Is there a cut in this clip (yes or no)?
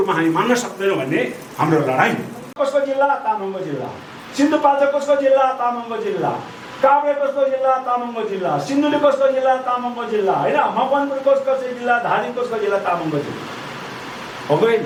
no